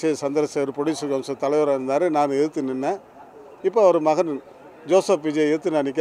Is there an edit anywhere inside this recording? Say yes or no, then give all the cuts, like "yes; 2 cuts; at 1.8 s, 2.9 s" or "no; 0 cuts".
no; 0 cuts